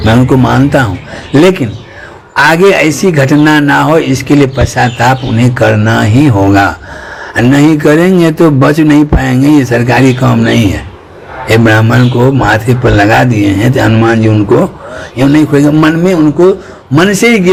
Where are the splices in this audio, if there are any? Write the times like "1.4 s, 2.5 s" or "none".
none